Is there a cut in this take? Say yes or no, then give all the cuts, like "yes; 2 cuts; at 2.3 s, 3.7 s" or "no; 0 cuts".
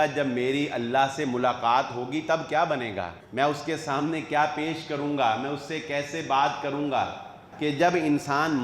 yes; 2 cuts; at 3.2 s, 7.5 s